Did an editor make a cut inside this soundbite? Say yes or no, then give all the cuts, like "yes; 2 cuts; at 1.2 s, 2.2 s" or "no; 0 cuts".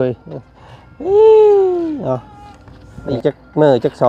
yes; 1 cut; at 3.2 s